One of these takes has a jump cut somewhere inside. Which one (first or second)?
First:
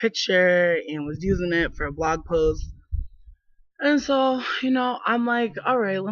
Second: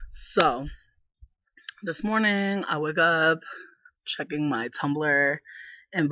first